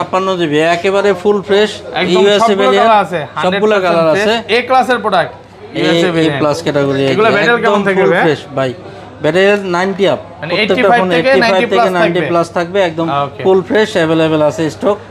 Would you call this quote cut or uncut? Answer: uncut